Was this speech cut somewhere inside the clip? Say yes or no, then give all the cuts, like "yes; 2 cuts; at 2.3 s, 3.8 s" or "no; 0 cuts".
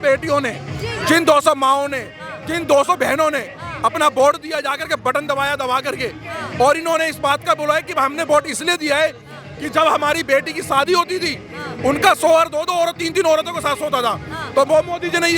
no; 0 cuts